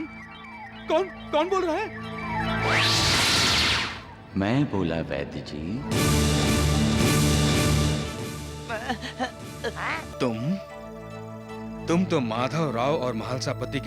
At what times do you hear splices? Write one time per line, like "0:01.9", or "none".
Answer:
0:10.1